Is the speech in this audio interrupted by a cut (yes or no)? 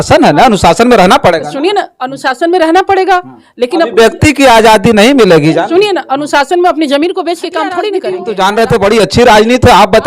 yes